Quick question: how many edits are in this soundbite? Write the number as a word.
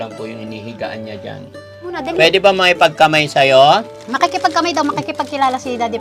one